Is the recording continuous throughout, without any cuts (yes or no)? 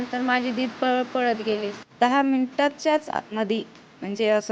no